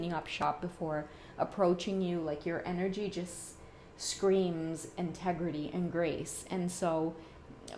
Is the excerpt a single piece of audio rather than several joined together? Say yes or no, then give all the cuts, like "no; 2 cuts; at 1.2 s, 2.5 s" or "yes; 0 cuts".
yes; 0 cuts